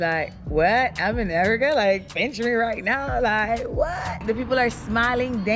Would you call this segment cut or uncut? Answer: cut